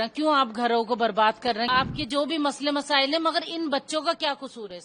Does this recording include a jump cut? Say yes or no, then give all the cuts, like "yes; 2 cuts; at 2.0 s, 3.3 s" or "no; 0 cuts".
yes; 1 cut; at 1.7 s